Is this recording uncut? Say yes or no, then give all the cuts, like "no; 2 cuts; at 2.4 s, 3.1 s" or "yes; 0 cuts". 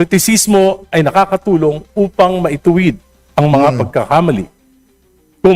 yes; 0 cuts